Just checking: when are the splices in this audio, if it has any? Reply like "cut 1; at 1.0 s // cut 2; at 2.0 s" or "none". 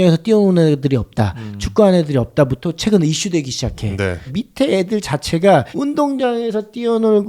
cut 1; at 4.3 s // cut 2; at 5.7 s